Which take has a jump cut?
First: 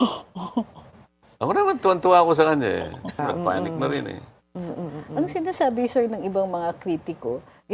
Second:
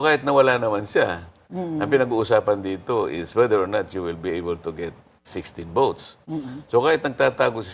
first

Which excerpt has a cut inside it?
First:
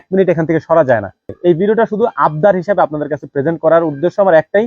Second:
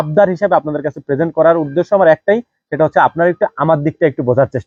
first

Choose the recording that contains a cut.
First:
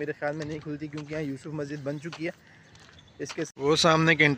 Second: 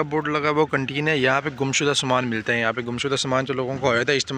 first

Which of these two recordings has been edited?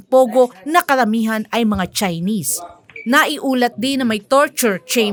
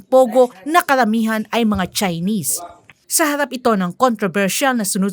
second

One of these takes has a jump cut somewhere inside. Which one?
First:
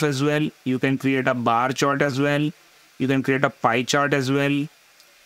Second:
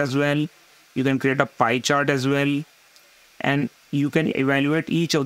second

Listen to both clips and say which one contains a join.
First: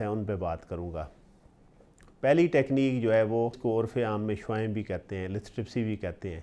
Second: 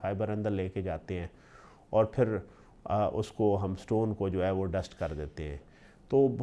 first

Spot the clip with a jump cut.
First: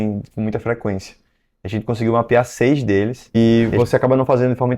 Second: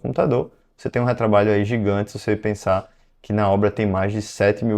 first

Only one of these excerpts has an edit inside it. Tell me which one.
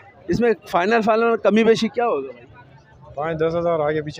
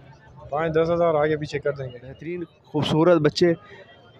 second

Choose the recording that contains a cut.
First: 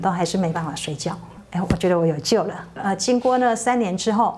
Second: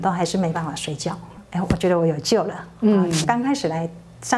first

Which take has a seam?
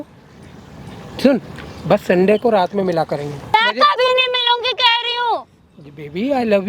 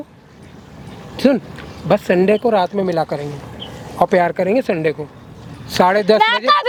first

